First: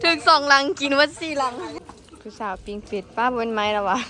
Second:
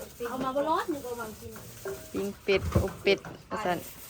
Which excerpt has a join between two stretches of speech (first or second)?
first